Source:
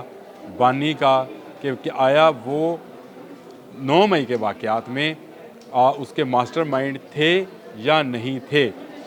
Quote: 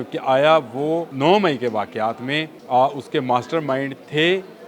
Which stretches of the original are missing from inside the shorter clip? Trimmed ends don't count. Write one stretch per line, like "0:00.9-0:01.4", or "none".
0:02.8-0:03.8
0:05.2-0:05.6